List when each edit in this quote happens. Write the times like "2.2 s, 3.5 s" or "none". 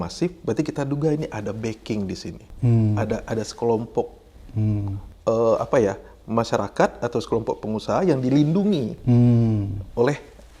none